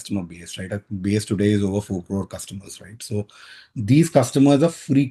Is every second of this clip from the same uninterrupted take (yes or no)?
yes